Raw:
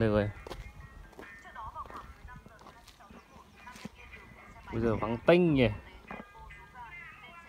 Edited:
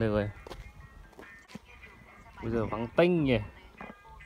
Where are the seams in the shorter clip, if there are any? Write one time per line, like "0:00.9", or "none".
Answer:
0:01.5

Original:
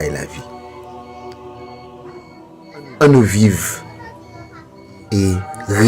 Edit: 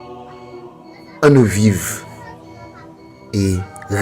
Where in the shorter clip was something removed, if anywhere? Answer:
0:01.2

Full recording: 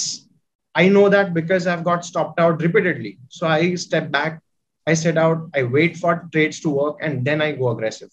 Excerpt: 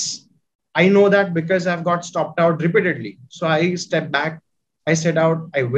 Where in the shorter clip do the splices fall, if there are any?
none

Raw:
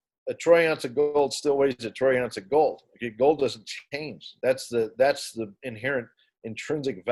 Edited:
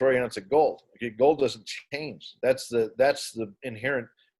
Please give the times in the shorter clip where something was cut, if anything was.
none

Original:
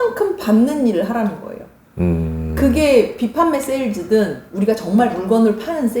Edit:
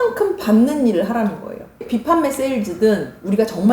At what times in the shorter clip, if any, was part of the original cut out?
0:01.8

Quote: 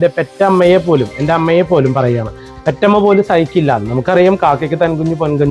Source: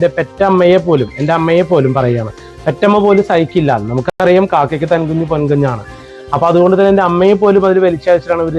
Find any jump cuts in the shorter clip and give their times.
0:04.0

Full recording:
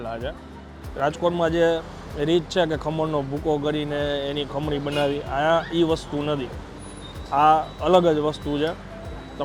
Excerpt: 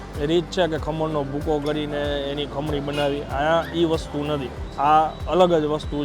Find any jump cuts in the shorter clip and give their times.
0:04.6

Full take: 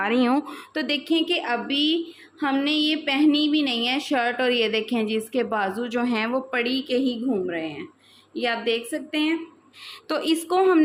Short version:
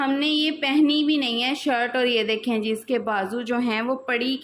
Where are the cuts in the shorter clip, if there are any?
none

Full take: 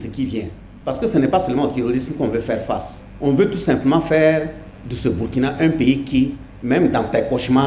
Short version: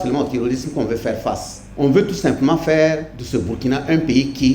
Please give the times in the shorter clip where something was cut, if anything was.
0:03.1

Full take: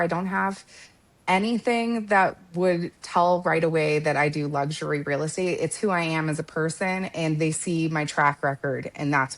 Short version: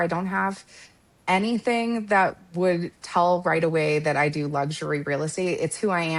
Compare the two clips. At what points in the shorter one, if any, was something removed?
none

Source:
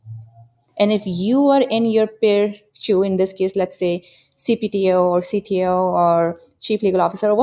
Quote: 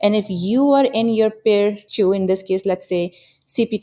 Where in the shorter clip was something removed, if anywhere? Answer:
0:01.8

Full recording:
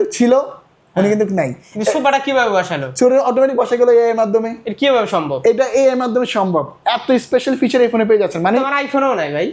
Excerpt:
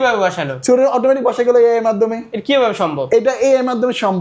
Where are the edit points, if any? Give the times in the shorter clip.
none

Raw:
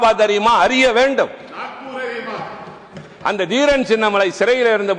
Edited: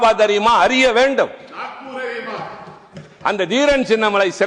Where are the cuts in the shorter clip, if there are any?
none

